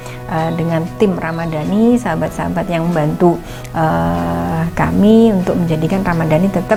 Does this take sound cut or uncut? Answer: uncut